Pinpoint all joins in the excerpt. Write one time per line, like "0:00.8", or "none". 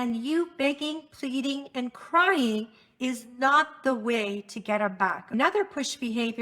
0:05.3